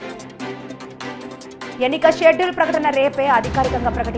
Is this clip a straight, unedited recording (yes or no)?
yes